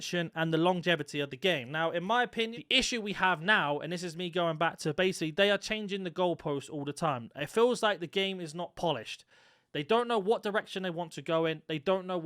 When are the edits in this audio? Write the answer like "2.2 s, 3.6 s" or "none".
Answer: 2.5 s